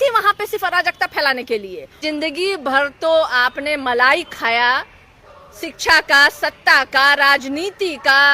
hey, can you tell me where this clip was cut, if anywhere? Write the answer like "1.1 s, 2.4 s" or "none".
2.0 s